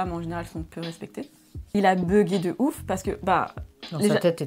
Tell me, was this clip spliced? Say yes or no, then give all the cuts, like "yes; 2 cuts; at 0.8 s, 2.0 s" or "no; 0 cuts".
yes; 1 cut; at 1.7 s